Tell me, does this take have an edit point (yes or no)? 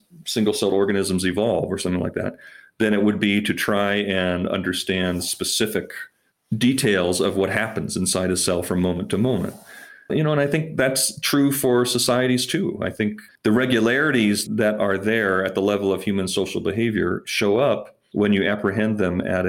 yes